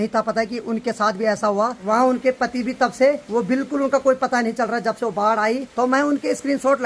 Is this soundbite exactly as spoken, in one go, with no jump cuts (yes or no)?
no